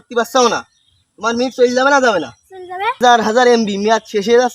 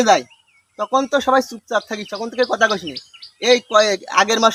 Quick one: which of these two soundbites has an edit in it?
first; 1 cut; at 3.0 s

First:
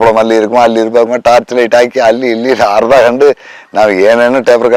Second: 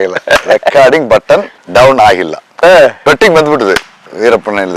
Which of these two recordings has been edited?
second; 2 cuts; at 1.6 s, 3.0 s

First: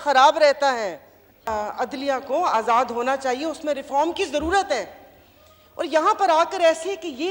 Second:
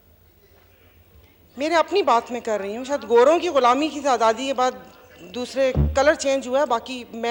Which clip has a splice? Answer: first; 1 cut; at 1.5 s

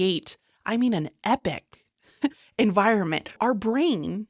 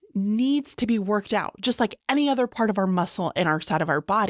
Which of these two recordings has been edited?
first; 1 cut; at 3.4 s

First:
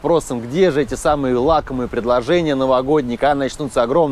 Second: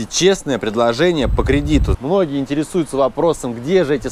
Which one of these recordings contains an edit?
second; 1 cut; at 1.9 s

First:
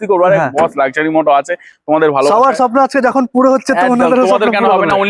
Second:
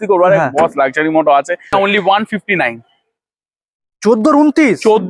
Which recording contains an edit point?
second; 1 cut; at 1.7 s

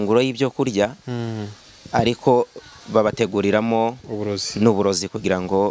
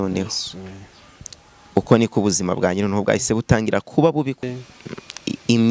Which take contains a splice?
second; 1 cut; at 4.4 s

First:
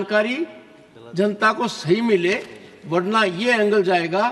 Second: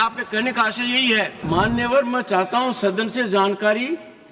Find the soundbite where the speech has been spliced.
second; 1 cut; at 1.4 s

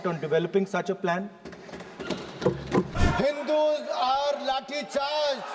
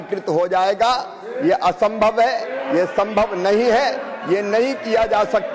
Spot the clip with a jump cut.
first; 1 cut; at 2.9 s

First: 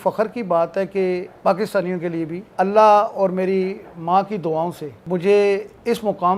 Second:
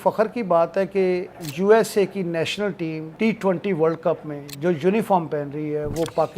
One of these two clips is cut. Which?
second; 2 cuts; at 1.3 s, 3.0 s

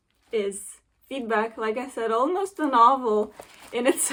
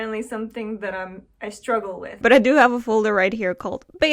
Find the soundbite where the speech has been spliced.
second; 1 cut; at 2.2 s

